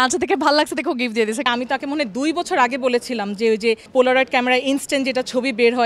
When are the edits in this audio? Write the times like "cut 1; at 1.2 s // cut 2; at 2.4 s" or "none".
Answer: cut 1; at 1.5 s // cut 2; at 3.9 s